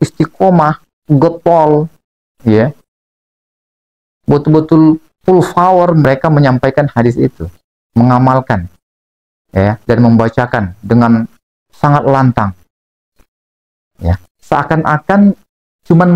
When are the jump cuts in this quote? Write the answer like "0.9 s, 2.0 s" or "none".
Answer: none